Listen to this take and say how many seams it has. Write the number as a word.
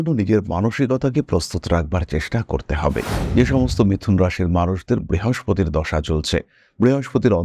one